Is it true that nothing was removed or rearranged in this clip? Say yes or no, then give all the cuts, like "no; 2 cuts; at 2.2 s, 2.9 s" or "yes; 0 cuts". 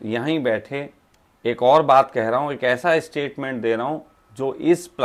yes; 0 cuts